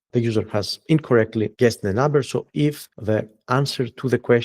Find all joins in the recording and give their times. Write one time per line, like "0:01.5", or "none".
0:01.5
0:02.9